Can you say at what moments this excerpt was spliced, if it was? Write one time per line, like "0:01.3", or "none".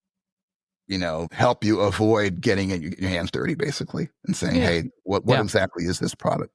none